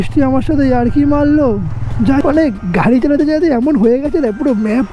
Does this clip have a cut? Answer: yes; 1 cut; at 2.2 s

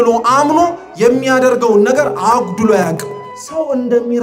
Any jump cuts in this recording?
yes; 1 cut; at 3.2 s

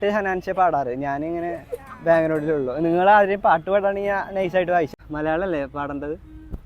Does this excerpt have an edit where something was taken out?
yes; 1 cut; at 5.0 s

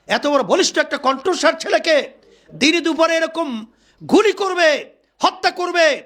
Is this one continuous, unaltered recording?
yes; 0 cuts

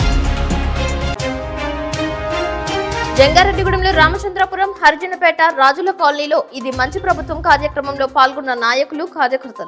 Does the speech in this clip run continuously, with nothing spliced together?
no; 1 cut; at 1.1 s

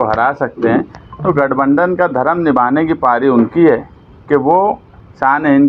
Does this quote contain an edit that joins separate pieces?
no; 0 cuts

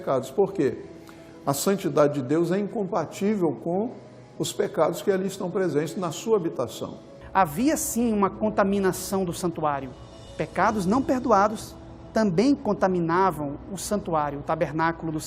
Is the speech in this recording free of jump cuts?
no; 1 cut; at 7.1 s

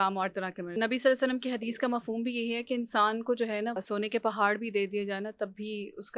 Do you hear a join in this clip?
yes; 2 cuts; at 0.7 s, 3.8 s

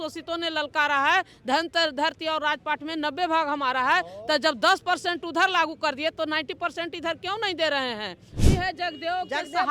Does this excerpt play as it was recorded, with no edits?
no; 1 cut; at 8.4 s

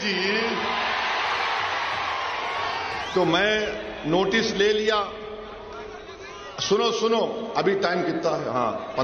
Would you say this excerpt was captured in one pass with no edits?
yes; 0 cuts

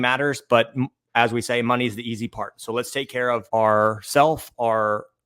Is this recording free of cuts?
yes; 0 cuts

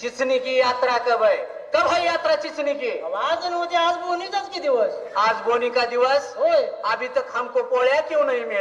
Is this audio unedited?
yes; 0 cuts

